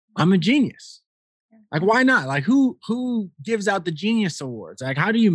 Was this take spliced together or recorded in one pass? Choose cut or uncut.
uncut